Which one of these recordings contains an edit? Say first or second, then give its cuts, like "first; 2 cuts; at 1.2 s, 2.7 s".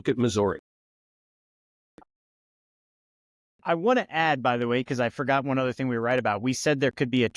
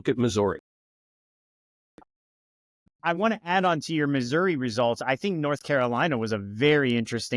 second; 1 cut; at 2.9 s